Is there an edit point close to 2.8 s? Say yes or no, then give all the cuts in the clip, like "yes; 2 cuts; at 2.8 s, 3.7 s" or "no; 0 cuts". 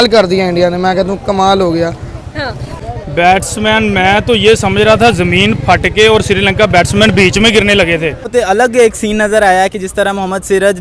yes; 2 cuts; at 2.8 s, 8.3 s